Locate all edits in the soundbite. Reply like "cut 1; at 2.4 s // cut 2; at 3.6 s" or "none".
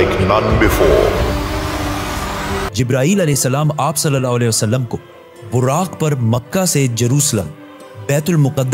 cut 1; at 2.7 s